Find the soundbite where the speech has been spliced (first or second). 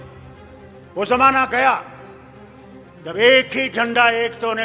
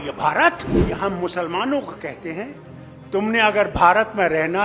second